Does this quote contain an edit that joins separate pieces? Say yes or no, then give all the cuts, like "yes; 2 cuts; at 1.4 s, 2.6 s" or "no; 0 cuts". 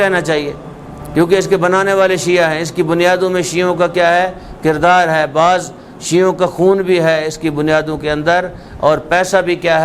no; 0 cuts